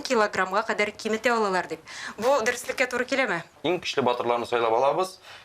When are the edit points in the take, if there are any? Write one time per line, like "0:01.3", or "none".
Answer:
0:03.6

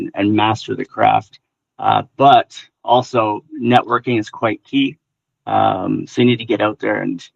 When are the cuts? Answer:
none

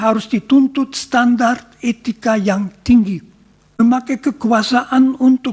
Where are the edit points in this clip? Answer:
0:03.8

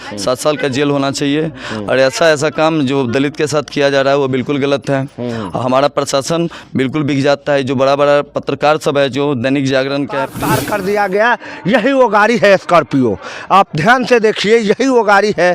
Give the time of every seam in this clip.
0:10.4

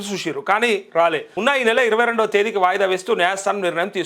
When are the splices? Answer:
0:01.3

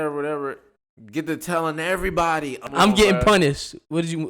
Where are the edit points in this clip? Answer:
0:02.7

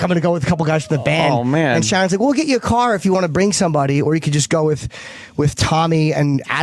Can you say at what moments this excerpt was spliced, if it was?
0:02.1

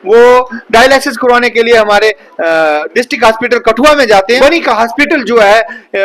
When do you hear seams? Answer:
0:04.4

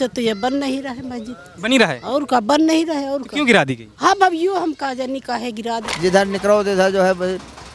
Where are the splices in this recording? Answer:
0:05.9

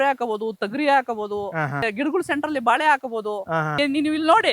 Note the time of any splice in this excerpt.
0:01.9
0:03.8

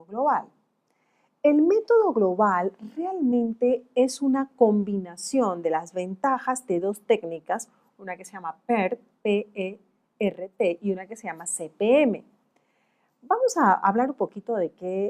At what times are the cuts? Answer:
0:07.3

